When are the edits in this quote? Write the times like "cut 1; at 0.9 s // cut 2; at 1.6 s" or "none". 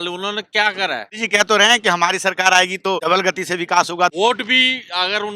cut 1; at 1.1 s // cut 2; at 3.0 s // cut 3; at 4.1 s